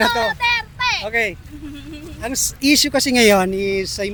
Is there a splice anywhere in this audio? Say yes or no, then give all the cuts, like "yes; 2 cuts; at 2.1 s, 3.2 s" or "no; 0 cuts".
no; 0 cuts